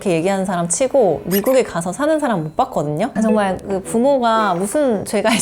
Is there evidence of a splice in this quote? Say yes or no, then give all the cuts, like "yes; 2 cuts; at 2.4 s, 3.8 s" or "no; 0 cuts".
yes; 1 cut; at 3.1 s